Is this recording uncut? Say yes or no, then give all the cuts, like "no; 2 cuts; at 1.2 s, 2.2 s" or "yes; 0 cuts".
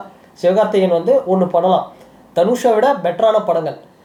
yes; 0 cuts